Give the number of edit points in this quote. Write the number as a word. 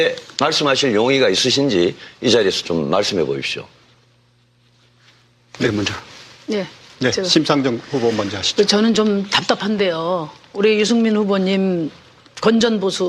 one